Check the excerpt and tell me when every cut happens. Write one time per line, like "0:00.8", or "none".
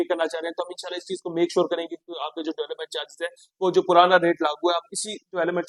none